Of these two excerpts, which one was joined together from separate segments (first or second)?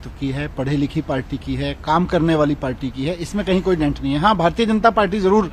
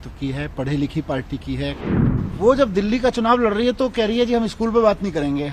second